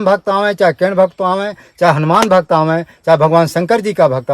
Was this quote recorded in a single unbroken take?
yes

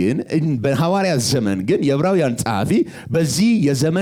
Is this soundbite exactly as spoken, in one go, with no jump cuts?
yes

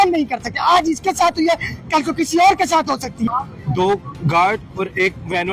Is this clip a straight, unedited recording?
no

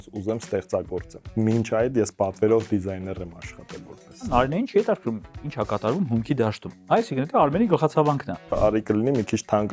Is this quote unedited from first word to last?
no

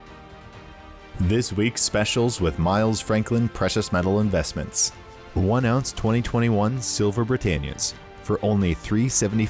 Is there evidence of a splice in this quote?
yes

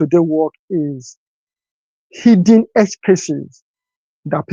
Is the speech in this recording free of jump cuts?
yes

